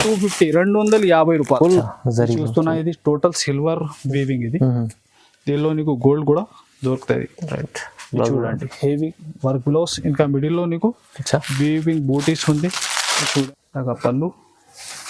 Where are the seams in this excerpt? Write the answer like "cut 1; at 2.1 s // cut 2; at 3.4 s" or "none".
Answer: cut 1; at 1.8 s // cut 2; at 13.4 s